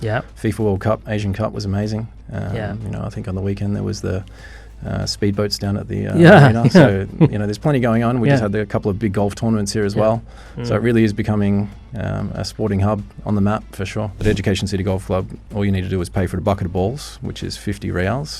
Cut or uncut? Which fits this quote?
cut